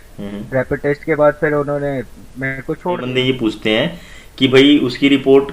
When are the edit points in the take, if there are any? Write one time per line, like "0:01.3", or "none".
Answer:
0:03.0